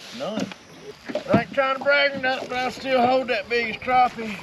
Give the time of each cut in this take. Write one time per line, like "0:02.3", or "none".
0:00.9